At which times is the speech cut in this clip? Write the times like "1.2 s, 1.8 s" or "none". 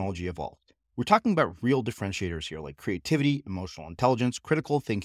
none